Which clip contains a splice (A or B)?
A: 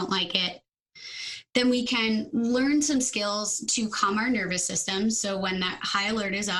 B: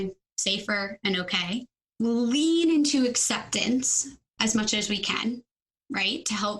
B